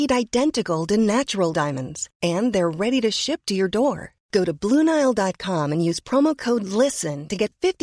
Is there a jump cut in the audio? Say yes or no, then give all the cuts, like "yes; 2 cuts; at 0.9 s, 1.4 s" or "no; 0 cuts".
no; 0 cuts